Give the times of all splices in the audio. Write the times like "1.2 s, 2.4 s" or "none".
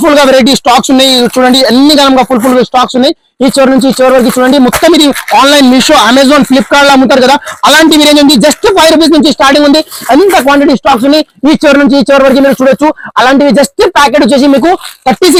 none